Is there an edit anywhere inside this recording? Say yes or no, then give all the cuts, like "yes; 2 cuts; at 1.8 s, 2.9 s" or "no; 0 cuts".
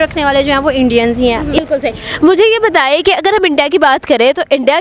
no; 0 cuts